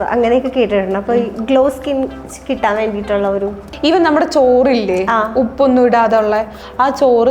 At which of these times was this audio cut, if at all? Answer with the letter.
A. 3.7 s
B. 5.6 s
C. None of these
A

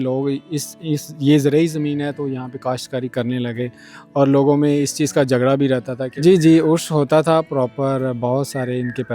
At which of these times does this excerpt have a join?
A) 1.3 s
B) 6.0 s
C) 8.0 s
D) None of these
B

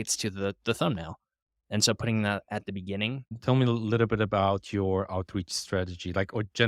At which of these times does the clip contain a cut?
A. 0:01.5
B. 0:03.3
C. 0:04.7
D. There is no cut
B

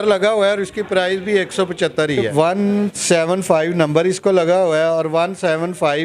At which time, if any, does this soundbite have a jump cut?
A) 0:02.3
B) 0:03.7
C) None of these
A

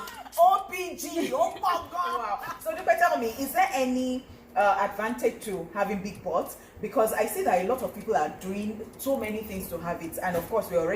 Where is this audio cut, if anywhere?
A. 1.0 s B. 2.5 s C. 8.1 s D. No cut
B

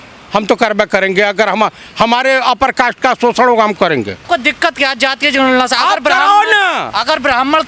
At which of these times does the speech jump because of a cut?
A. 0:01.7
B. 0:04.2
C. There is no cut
B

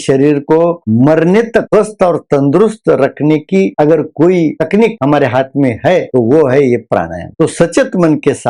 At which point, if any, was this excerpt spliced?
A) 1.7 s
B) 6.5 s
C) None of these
A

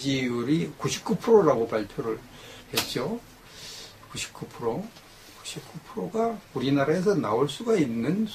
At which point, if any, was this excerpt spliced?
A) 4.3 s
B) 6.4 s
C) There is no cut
A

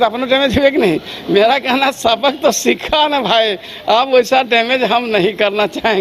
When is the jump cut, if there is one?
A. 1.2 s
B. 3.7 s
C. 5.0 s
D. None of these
D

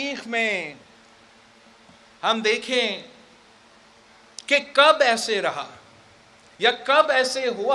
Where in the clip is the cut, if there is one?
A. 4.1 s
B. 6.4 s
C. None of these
A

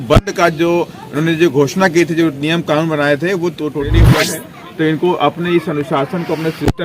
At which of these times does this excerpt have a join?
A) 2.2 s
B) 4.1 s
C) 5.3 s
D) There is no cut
B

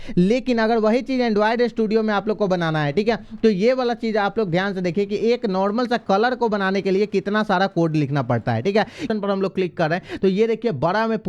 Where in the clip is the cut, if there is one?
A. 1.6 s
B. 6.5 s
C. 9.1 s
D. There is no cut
C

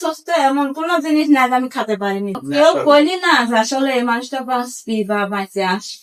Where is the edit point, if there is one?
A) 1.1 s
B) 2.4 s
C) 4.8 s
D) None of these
B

